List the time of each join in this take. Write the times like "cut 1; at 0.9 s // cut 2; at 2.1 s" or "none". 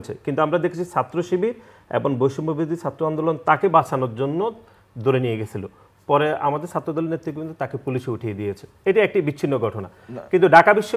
none